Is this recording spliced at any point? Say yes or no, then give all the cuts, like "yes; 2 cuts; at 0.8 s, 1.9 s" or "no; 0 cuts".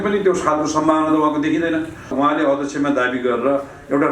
yes; 1 cut; at 2.1 s